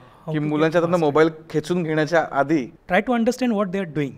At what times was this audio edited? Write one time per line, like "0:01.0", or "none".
0:02.8